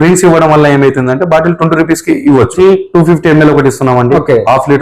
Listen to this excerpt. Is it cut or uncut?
cut